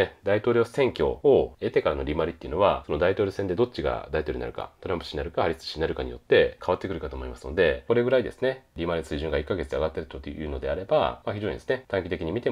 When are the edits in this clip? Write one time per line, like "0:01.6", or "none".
0:01.3
0:02.8
0:06.6
0:07.8
0:11.4